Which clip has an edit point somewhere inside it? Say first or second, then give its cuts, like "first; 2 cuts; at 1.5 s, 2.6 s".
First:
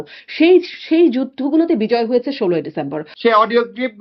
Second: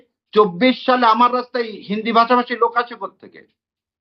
first; 1 cut; at 3.0 s